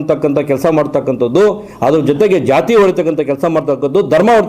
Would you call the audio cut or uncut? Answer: uncut